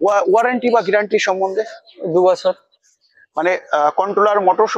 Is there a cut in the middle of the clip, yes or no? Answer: no